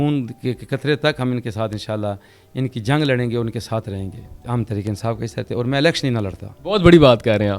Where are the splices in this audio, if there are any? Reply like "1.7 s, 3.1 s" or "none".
4.3 s, 6.5 s

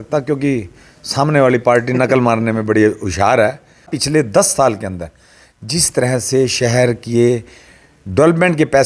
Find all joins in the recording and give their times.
4.0 s

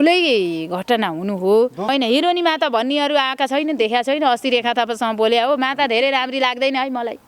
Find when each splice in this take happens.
1.9 s

